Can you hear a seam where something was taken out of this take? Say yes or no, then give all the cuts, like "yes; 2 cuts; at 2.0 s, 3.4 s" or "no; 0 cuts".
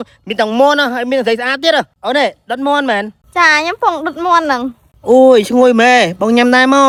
no; 0 cuts